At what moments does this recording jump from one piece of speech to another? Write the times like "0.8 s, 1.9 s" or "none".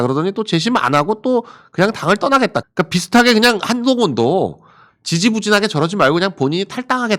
2.7 s